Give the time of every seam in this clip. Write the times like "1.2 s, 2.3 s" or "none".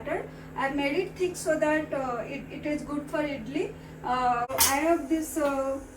4.5 s